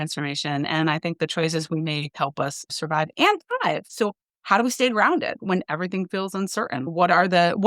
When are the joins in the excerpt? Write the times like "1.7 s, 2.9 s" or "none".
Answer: 2.7 s, 3.9 s, 5.4 s, 6.9 s

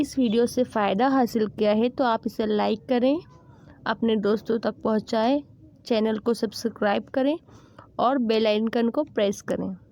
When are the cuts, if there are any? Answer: none

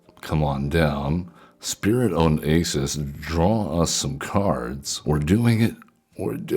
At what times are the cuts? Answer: 4.9 s

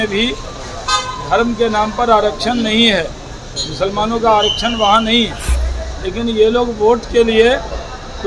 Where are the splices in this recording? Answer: none

